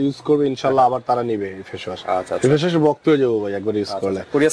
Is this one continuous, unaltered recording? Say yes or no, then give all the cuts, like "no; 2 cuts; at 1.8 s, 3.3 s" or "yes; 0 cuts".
yes; 0 cuts